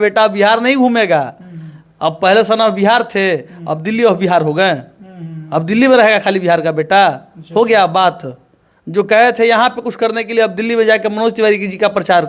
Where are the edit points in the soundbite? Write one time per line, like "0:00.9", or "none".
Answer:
none